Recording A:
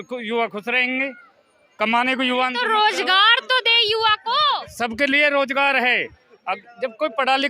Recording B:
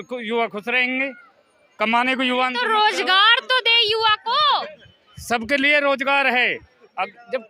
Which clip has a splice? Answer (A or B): A